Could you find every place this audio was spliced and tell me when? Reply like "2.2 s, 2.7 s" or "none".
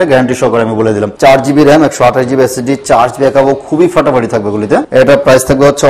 1.1 s, 4.9 s